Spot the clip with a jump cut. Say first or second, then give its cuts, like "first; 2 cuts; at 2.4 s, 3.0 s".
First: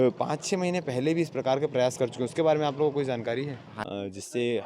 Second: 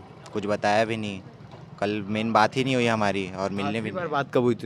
first; 1 cut; at 3.7 s